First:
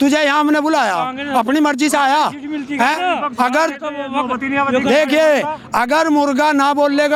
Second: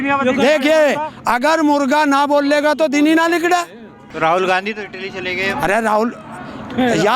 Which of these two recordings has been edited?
second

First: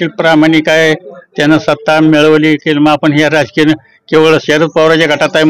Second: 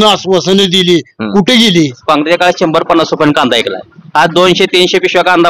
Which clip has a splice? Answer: second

